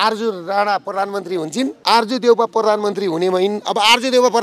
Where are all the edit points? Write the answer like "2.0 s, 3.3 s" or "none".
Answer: 1.8 s